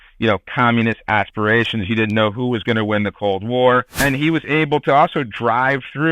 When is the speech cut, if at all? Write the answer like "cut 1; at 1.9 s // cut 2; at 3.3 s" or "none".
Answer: cut 1; at 3.9 s